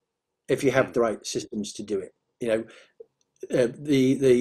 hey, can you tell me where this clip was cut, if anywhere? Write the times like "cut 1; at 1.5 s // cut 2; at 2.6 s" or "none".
none